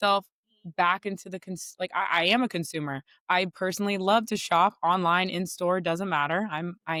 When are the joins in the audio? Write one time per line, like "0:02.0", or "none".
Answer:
none